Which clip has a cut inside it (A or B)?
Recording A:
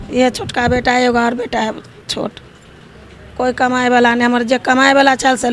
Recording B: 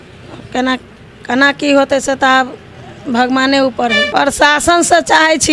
B